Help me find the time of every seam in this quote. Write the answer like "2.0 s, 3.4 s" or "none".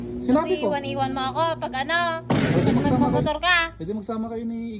2.3 s